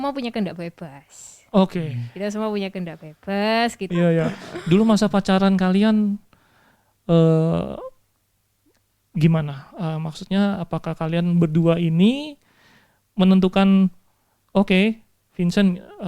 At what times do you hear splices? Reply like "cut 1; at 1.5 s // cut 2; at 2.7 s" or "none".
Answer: cut 1; at 3.8 s